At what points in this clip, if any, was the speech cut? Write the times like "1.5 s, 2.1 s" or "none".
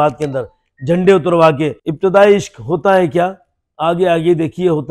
1.8 s